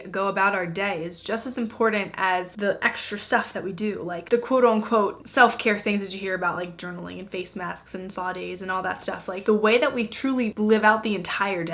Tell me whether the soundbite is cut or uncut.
uncut